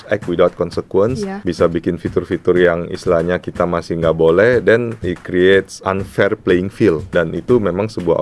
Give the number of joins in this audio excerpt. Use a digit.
4